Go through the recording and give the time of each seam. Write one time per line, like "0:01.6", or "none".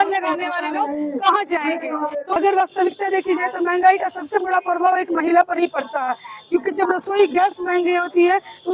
0:02.3